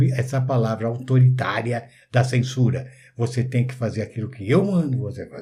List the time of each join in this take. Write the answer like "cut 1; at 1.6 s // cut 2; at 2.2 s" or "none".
none